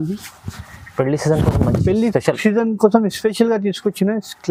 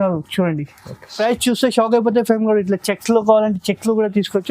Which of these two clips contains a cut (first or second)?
second